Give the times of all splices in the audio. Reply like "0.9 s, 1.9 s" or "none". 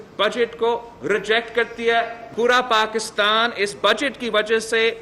2.2 s